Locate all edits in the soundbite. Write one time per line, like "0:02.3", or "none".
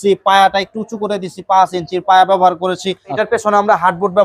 0:03.1